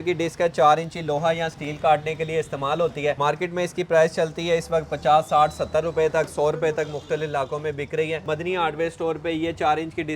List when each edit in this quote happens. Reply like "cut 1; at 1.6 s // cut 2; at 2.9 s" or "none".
cut 1; at 3.2 s // cut 2; at 8.2 s